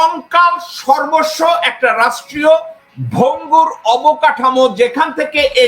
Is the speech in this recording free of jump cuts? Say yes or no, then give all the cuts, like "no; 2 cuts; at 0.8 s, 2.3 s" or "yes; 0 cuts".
yes; 0 cuts